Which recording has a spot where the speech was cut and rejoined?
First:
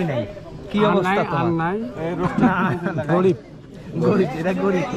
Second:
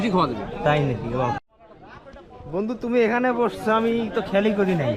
second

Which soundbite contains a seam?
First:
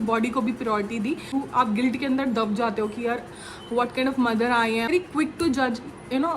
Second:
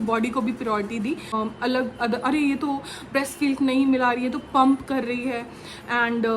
first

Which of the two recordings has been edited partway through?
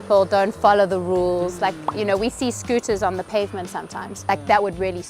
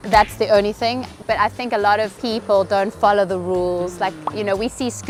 first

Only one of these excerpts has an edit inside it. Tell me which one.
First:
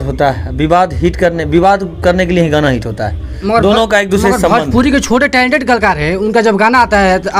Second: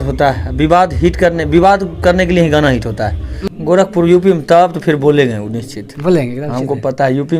second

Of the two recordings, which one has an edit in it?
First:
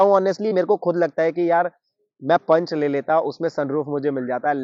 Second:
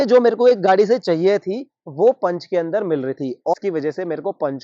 second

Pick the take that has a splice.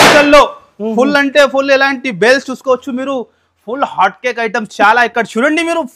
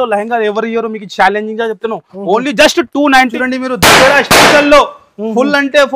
second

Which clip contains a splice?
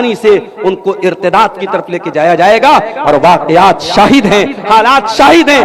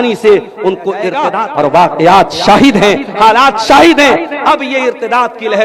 second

